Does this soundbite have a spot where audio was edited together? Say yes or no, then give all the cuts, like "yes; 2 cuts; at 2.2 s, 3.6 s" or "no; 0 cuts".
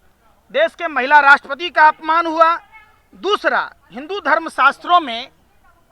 no; 0 cuts